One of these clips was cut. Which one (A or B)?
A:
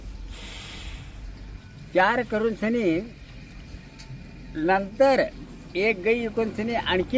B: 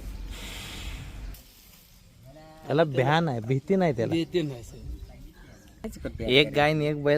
B